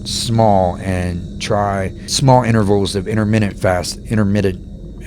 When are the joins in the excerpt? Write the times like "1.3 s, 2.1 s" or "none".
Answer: 2.1 s